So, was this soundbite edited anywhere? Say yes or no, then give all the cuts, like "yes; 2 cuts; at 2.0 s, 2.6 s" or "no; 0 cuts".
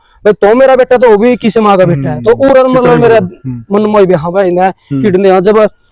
no; 0 cuts